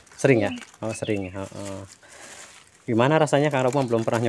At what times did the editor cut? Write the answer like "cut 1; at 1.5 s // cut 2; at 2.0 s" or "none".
none